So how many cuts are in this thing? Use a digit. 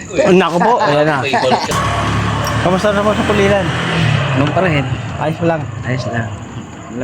1